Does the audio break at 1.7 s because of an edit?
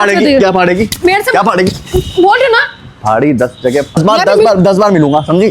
no; 1 cut; at 4.0 s

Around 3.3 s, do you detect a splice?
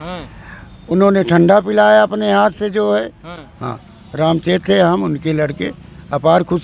no; 0 cuts

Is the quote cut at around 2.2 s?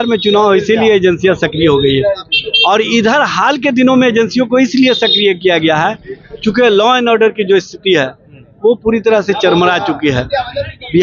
no; 0 cuts

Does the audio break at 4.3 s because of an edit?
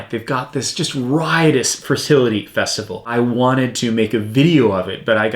no; 1 cut; at 3.1 s

